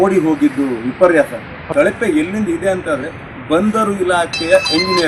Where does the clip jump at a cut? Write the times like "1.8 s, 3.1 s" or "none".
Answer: 1.7 s